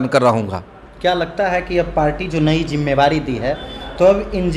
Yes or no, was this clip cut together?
no